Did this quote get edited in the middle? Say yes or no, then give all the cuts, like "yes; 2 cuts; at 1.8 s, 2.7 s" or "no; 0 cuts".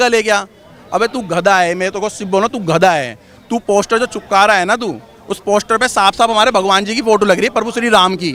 no; 0 cuts